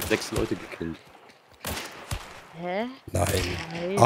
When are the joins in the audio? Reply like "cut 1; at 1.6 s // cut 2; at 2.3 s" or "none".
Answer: none